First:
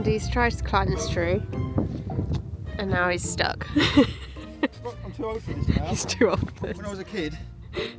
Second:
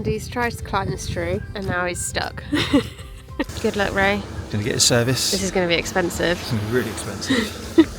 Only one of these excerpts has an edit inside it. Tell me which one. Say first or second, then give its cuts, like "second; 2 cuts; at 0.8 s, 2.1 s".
second; 2 cuts; at 1.5 s, 3.5 s